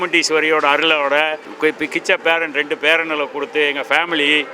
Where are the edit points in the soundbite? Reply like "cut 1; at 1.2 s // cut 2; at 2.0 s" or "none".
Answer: cut 1; at 1.4 s